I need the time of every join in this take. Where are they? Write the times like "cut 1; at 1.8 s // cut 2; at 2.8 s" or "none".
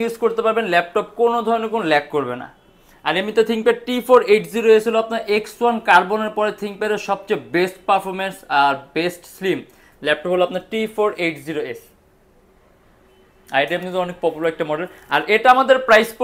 none